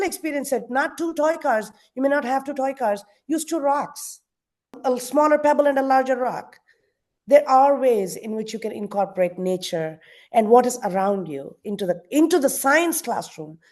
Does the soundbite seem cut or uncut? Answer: cut